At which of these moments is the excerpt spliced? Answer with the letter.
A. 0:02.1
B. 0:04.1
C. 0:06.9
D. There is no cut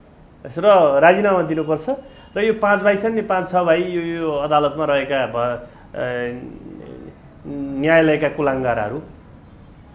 D